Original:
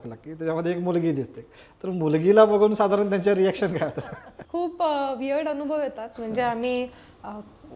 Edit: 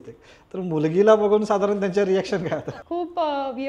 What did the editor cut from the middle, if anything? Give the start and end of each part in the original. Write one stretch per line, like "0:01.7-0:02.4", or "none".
0:04.1-0:04.4